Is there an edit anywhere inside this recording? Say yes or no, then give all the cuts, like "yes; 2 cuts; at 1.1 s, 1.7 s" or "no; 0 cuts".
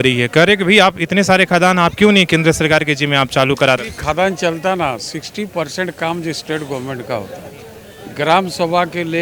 yes; 1 cut; at 3.8 s